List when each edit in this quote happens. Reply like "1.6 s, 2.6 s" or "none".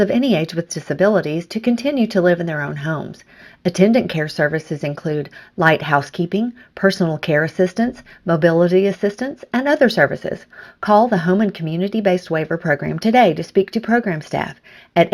none